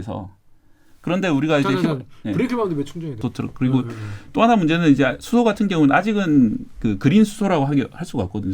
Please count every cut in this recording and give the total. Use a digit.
1